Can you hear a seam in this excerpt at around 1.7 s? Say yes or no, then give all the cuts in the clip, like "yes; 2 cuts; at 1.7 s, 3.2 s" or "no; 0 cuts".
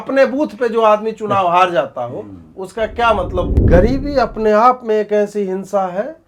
no; 1 cut; at 3.6 s